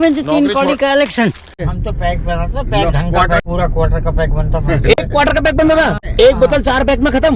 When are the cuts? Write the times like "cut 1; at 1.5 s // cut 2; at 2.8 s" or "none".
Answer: cut 1; at 1.6 s // cut 2; at 3.4 s // cut 3; at 6.1 s